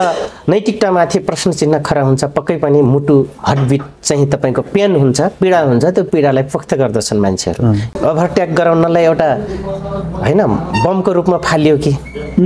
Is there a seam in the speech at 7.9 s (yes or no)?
yes